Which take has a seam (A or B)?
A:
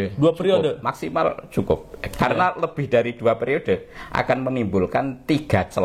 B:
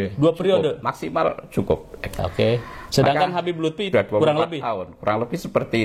B